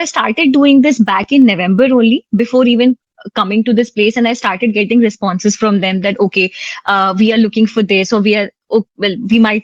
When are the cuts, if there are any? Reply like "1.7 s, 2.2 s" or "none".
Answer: none

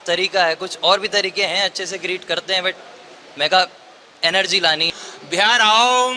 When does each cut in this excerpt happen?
4.9 s

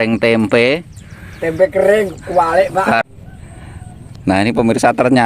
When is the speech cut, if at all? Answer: 3.0 s

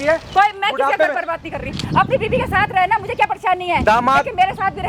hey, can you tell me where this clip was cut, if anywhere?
none

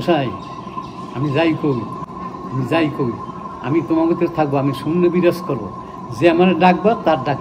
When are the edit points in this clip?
2.0 s

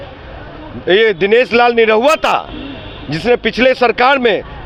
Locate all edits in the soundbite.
none

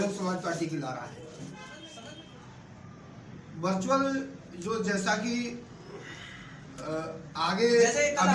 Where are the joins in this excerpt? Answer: 1.8 s

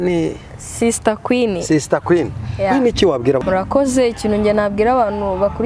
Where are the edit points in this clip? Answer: 3.4 s

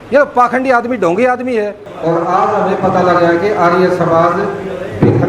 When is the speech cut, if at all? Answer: 1.9 s

